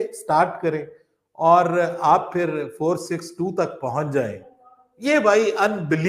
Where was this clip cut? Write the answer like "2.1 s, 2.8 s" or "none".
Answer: none

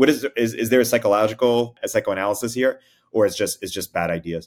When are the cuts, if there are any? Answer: 1.8 s

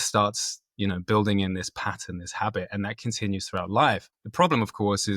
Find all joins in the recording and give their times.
4.1 s

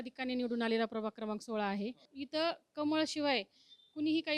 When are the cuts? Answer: 2.1 s

